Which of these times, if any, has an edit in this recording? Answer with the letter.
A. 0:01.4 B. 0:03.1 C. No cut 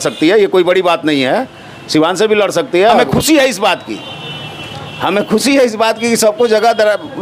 B